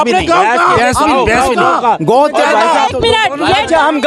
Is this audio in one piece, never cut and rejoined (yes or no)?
yes